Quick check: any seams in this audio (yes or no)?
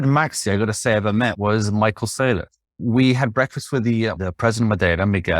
yes